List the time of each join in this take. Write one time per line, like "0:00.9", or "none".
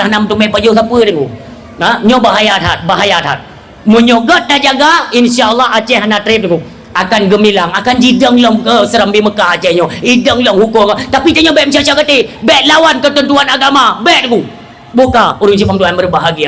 none